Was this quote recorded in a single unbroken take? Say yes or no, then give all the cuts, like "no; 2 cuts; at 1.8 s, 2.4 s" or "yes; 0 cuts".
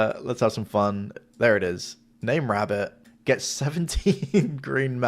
no; 2 cuts; at 1.2 s, 3.0 s